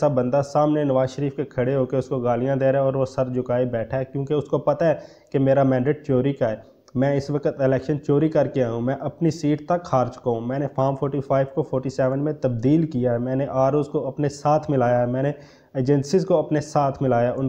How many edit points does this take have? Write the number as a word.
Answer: zero